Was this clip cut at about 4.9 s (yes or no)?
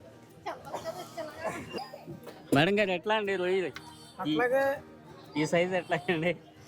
no